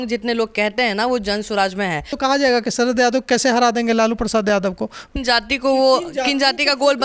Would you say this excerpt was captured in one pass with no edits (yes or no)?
no